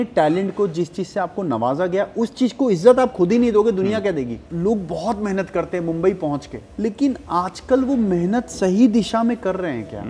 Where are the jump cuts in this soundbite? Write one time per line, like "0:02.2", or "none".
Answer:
0:04.4
0:06.6